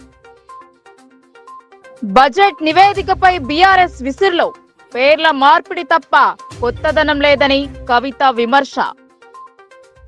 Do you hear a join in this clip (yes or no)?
yes